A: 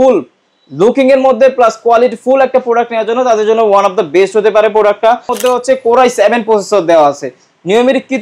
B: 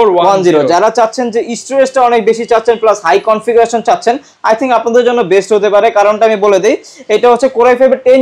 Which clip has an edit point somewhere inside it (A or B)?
A